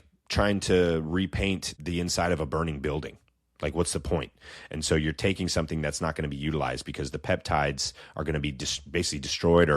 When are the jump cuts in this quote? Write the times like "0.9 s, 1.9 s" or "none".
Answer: 1.7 s